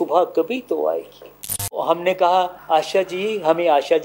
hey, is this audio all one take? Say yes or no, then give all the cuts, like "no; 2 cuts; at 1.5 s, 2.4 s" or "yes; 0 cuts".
no; 2 cuts; at 1.8 s, 2.6 s